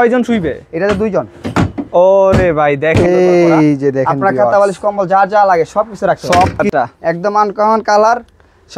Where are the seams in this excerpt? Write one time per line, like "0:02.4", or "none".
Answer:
0:03.0
0:06.7